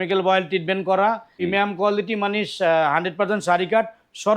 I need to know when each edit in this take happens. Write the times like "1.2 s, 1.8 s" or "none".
1.3 s